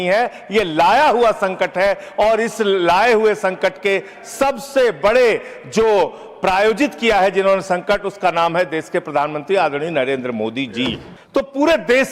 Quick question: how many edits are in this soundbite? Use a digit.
1